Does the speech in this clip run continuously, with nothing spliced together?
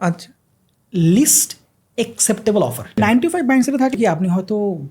no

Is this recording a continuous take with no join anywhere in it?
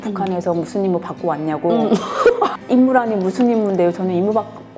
no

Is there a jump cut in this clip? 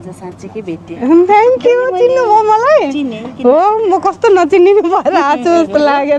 no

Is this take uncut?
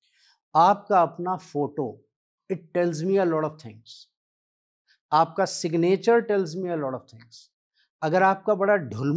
yes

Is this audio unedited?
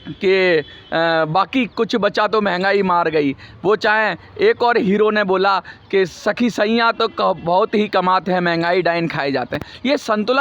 yes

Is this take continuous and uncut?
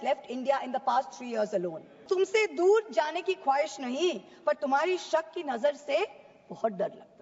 no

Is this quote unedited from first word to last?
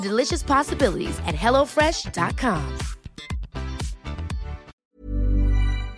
no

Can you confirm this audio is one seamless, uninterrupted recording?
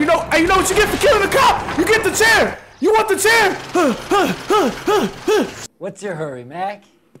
no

